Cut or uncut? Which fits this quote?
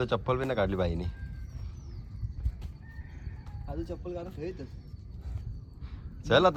uncut